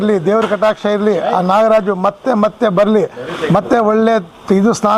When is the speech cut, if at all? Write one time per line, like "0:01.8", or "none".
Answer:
none